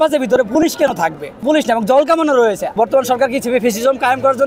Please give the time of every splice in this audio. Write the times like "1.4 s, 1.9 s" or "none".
1.4 s, 2.7 s